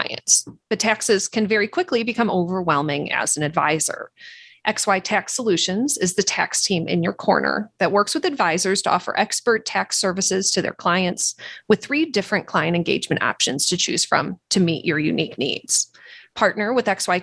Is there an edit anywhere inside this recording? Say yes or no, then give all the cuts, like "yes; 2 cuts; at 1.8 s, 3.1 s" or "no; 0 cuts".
no; 0 cuts